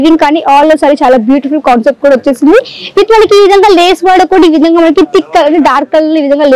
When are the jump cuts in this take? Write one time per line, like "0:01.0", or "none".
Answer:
none